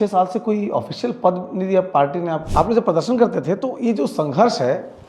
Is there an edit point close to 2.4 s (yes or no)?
yes